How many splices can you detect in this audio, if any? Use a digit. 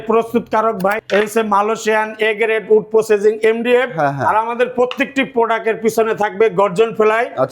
1